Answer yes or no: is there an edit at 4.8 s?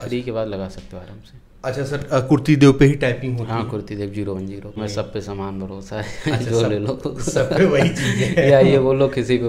yes